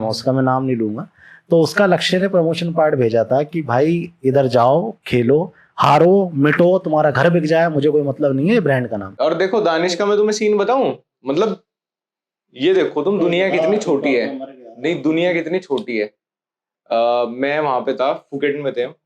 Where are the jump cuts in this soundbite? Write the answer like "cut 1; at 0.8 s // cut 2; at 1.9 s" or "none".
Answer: cut 1; at 9.0 s